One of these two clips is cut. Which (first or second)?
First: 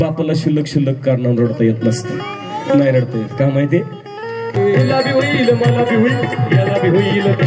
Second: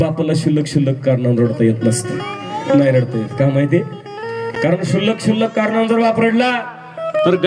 first